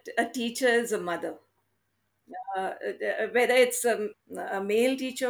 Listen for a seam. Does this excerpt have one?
yes; 2 cuts; at 1.6 s, 4.1 s

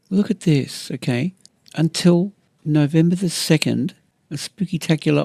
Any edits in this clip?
yes; 1 cut; at 4.1 s

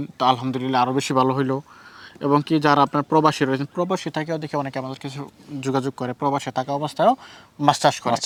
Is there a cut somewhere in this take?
no; 0 cuts

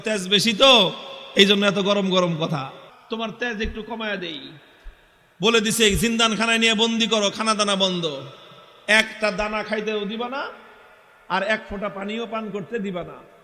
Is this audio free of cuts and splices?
no; 1 cut; at 2.9 s

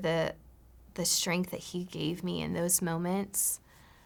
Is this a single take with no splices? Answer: yes; 0 cuts

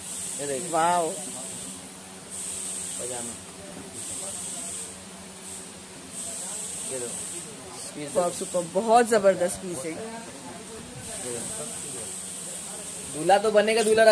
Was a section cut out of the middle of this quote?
no; 0 cuts

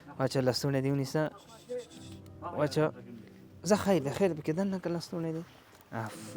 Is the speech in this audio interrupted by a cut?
no; 0 cuts

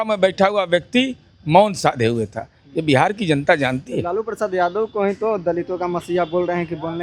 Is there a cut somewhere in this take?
no; 0 cuts

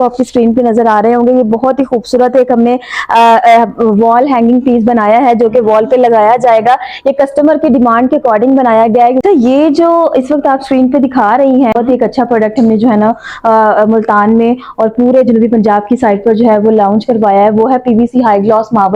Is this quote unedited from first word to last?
no; 2 cuts; at 9.2 s, 11.7 s

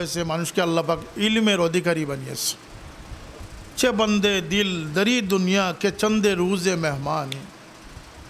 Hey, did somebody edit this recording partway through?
yes; 1 cut; at 3.4 s

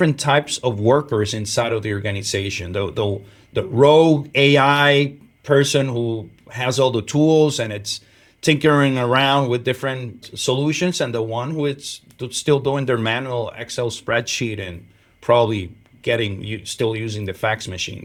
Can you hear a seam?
no; 0 cuts

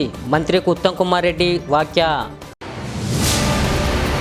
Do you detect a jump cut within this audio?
no; 0 cuts

